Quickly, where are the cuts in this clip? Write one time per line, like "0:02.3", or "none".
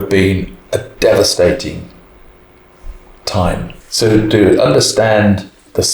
none